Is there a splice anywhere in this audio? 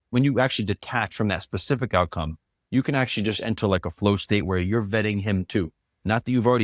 no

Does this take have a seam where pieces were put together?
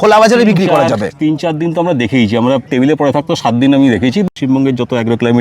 yes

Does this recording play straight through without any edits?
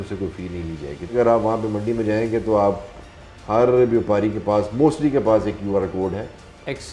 no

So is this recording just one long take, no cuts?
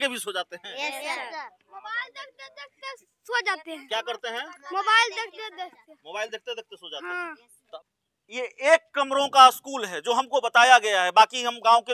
no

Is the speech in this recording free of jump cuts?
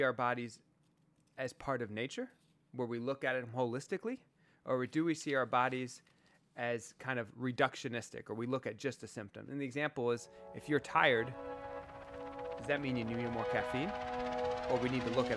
yes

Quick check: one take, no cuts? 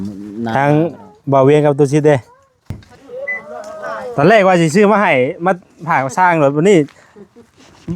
no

